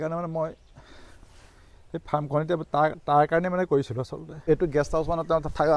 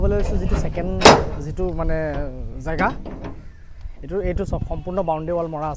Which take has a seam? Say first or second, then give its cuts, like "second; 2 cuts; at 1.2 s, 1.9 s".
first; 1 cut; at 4.5 s